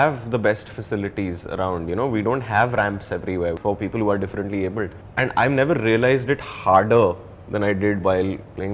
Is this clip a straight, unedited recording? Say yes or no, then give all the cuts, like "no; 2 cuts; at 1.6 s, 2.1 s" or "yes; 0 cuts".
no; 2 cuts; at 3.6 s, 5.0 s